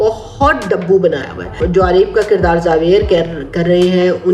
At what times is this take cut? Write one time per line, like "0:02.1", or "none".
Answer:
0:01.6